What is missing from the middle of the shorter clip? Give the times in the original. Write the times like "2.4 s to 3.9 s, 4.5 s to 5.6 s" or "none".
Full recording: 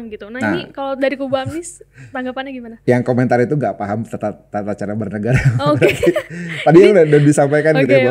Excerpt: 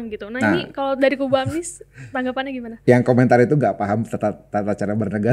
none